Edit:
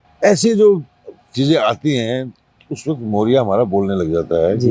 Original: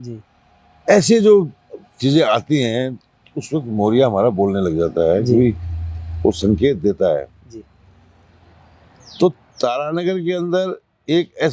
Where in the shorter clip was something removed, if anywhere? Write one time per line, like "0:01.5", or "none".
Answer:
none